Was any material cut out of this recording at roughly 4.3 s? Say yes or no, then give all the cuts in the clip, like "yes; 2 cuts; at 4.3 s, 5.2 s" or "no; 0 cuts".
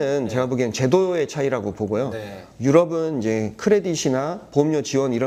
no; 0 cuts